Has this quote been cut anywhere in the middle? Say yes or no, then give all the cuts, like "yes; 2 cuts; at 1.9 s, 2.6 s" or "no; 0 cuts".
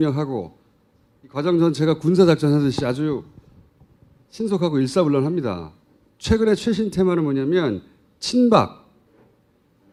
no; 0 cuts